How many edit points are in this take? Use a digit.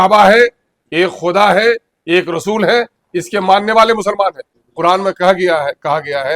1